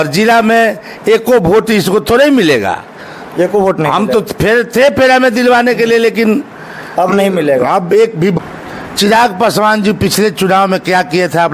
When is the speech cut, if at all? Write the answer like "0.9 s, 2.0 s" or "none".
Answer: 8.4 s